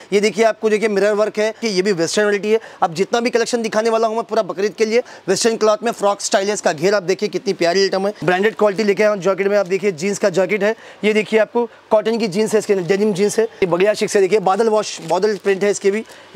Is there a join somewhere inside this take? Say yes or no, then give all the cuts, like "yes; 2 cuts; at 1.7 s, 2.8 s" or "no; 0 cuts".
yes; 4 cuts; at 1.6 s, 5.2 s, 8.2 s, 13.6 s